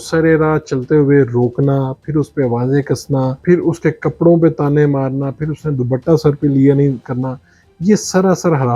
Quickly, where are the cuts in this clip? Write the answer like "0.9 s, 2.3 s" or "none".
3.4 s